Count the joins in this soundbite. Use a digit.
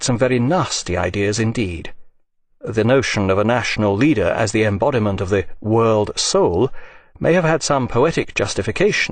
1